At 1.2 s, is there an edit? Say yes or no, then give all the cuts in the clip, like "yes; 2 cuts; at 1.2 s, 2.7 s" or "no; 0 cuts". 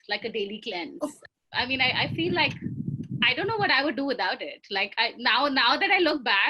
yes; 1 cut; at 1.2 s